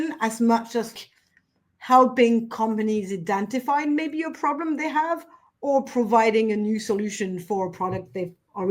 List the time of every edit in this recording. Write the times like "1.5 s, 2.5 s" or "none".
0.9 s